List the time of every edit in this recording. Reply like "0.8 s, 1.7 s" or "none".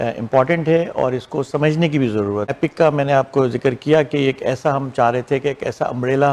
2.5 s